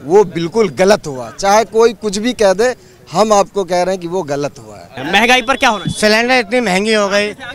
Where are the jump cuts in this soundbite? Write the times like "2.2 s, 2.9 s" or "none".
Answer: 5.0 s